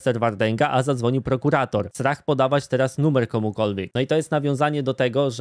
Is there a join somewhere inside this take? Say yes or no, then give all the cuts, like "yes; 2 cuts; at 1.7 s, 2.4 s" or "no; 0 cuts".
no; 0 cuts